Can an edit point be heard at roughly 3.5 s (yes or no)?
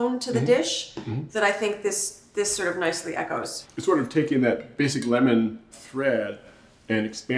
yes